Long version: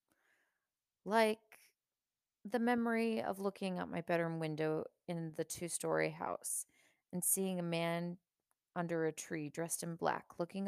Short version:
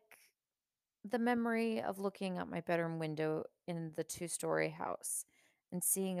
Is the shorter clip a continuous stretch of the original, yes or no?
yes